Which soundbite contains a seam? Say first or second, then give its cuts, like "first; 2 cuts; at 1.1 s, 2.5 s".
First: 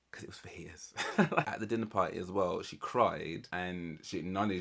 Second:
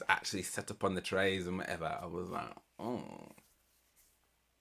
first; 2 cuts; at 1.5 s, 3.5 s